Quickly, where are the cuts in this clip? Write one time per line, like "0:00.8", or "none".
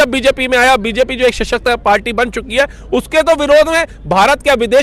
none